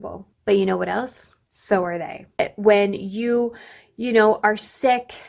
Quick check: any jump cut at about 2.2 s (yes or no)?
yes